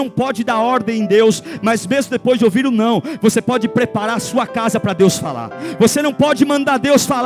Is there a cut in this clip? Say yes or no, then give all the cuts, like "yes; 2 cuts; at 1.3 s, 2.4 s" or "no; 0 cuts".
no; 0 cuts